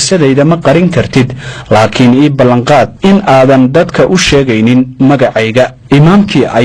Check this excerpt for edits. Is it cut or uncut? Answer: uncut